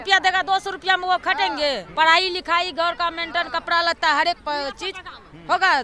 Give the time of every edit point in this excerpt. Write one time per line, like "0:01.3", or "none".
0:01.9